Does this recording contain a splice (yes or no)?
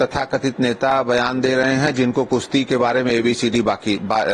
no